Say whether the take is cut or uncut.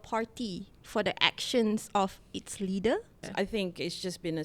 cut